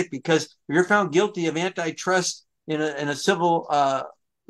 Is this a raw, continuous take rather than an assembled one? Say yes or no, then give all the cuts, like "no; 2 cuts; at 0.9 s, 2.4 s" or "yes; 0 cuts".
yes; 0 cuts